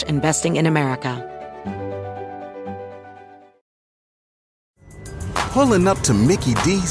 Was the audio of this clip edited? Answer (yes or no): yes